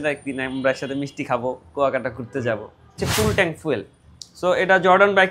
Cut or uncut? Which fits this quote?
cut